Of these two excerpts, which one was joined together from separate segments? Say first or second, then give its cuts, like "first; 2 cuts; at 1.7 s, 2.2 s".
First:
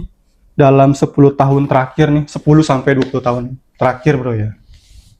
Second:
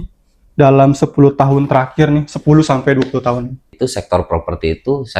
second; 1 cut; at 3.7 s